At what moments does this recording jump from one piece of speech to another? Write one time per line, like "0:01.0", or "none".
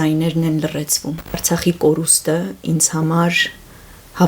0:01.4